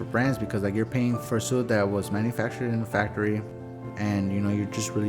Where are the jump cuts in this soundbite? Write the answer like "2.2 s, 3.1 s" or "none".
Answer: 1.2 s, 3.5 s